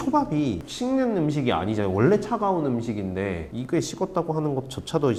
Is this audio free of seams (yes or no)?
yes